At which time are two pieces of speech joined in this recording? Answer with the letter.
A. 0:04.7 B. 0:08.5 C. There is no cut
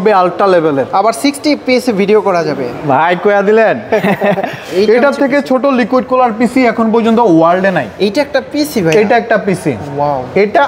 A